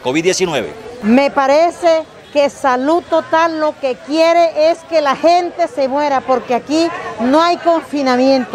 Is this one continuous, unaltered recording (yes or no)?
yes